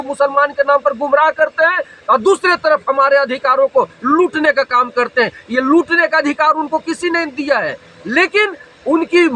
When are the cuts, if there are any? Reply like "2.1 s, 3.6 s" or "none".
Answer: none

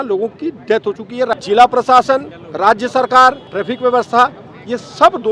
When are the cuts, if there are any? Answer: 1.3 s, 2.4 s, 3.4 s

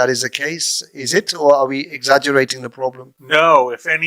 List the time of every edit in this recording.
3.1 s

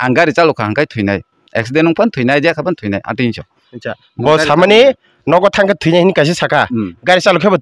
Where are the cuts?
none

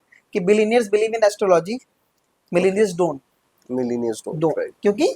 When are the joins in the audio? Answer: none

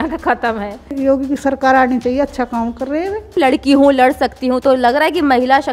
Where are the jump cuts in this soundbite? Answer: 0.9 s, 3.3 s

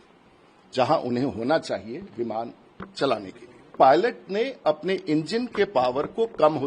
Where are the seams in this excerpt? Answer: 3.7 s

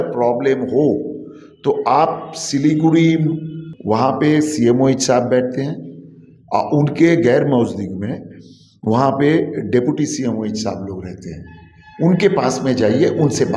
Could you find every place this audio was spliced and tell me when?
3.7 s

